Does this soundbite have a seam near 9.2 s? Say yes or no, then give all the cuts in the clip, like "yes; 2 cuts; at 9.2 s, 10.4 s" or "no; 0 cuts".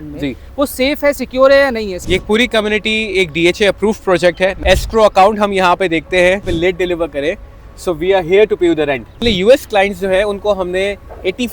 yes; 4 cuts; at 2.0 s, 4.6 s, 6.5 s, 9.2 s